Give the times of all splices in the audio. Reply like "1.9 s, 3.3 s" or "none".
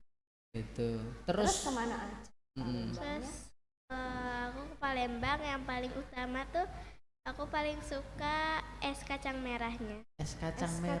none